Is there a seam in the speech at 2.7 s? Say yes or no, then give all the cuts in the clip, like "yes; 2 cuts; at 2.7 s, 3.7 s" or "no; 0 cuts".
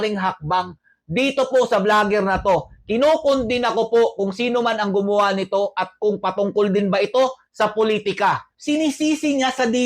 no; 1 cut; at 8.5 s